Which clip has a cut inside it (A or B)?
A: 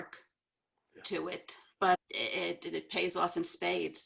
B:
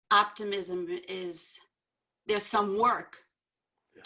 A